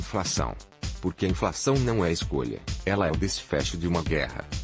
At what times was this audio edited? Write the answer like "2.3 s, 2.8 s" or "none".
none